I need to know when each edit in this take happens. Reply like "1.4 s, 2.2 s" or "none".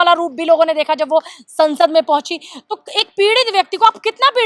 none